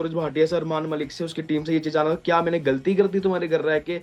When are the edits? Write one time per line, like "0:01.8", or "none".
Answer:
none

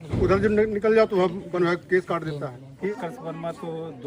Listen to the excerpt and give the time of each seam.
0:02.7

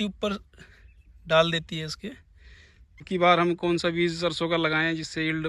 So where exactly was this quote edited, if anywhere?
0:03.1

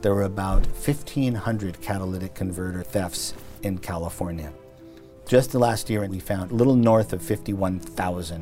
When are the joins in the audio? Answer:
0:06.2

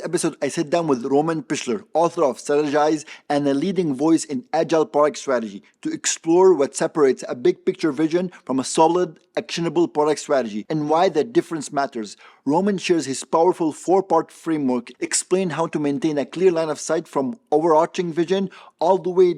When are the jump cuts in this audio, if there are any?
none

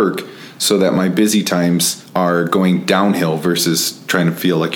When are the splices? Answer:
0:02.0

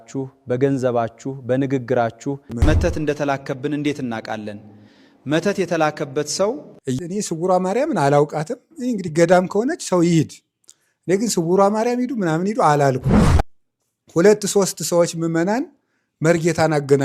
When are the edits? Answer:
0:02.6
0:07.0
0:13.4

